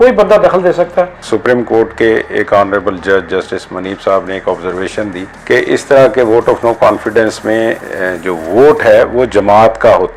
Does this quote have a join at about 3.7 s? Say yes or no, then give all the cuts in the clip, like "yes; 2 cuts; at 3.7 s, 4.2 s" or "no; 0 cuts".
no; 1 cut; at 1.3 s